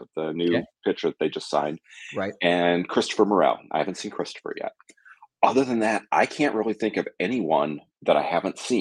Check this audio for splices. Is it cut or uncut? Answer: uncut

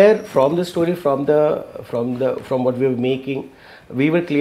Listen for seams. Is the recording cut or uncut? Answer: uncut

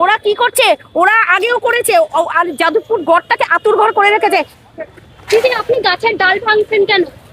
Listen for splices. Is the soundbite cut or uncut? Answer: cut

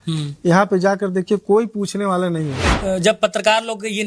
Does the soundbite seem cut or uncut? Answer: cut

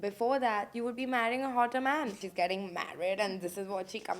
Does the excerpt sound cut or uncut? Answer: cut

